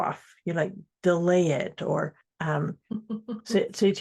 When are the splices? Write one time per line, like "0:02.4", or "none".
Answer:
0:02.3

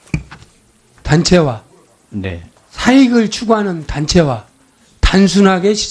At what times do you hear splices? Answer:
0:01.7

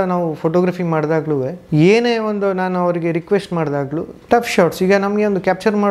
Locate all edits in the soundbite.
0:01.6
0:04.1

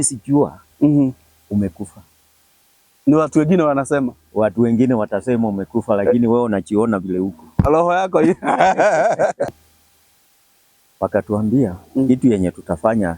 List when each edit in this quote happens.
0:09.5

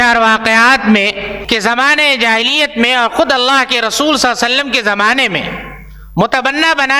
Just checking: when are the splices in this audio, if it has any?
0:01.3

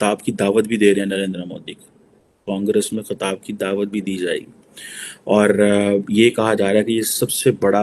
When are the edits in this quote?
none

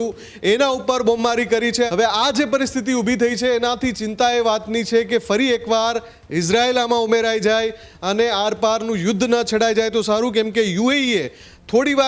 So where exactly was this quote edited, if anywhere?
0:01.9

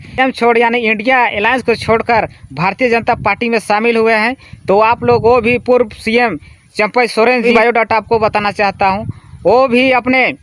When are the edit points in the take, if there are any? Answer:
0:07.4

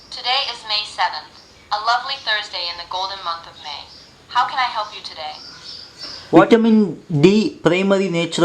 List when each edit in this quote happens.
0:06.4

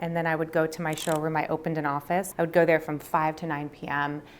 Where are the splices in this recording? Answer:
0:02.3

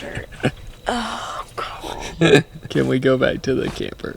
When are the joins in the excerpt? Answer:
none

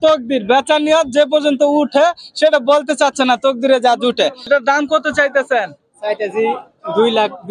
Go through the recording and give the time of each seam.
0:04.5

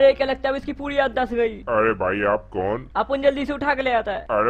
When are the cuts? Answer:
none

